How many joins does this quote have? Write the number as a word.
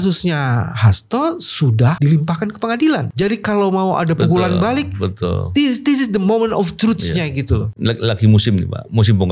three